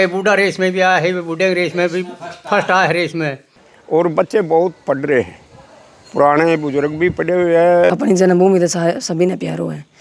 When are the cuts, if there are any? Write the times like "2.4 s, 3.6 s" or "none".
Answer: 3.5 s, 8.0 s